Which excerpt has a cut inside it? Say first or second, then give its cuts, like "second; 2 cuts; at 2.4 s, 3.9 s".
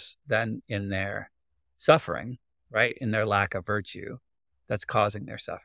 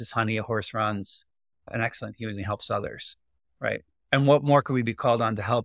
second; 1 cut; at 4.0 s